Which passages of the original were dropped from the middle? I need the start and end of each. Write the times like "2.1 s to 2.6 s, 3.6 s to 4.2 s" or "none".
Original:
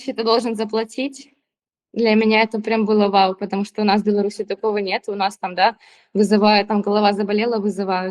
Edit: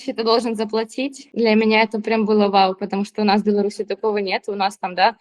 1.2 s to 1.8 s